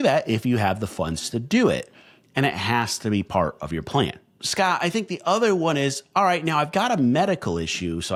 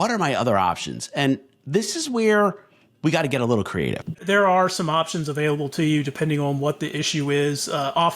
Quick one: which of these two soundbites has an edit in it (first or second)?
second